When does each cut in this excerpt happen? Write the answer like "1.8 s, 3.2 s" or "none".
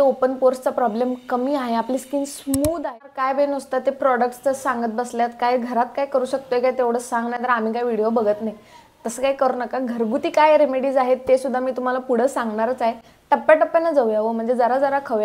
2.8 s